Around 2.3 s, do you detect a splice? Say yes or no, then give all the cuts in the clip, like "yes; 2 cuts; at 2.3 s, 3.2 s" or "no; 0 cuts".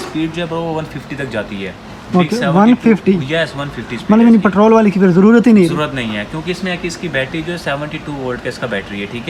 no; 0 cuts